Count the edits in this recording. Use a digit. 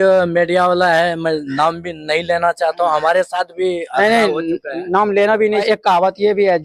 1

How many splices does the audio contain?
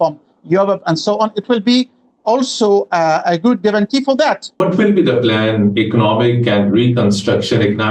1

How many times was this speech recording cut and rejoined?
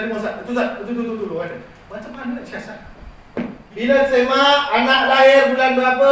1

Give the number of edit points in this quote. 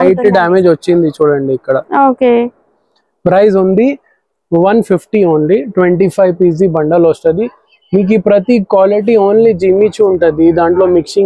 0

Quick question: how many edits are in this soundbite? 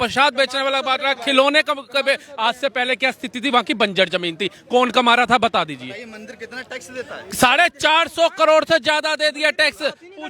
0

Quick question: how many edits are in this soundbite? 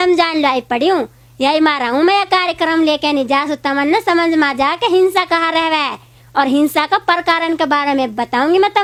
0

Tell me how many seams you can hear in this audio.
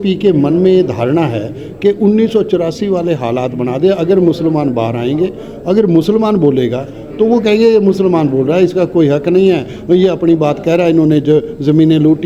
0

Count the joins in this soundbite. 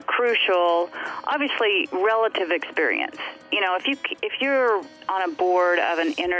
1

